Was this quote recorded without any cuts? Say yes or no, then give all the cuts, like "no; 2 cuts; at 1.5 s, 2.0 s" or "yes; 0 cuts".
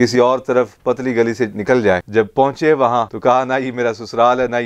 no; 2 cuts; at 2.1 s, 3.1 s